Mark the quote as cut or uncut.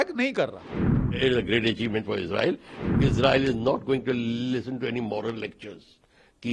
cut